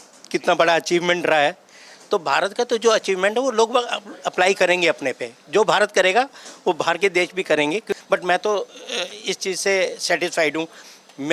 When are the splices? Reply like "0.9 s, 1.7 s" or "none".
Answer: 8.0 s